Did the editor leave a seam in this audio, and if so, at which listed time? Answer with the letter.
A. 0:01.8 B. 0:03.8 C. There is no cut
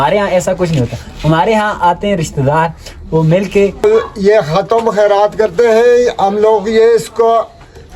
B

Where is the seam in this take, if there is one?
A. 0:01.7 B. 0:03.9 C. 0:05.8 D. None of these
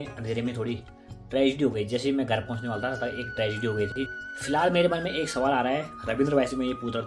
B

